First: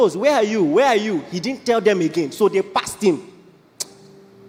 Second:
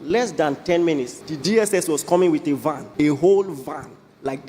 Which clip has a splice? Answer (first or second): second